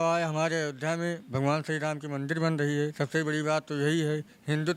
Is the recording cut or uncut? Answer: uncut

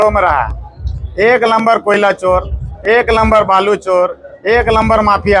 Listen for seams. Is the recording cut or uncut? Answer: uncut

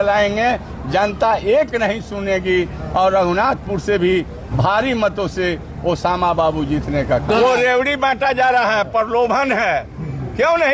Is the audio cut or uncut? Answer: cut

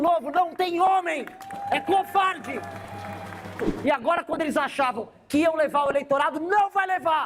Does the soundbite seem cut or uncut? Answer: cut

